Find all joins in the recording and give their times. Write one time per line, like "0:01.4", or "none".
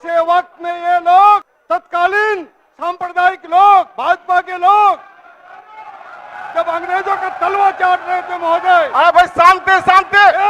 0:01.5